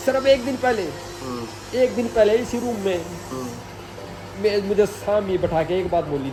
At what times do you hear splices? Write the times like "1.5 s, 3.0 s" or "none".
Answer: none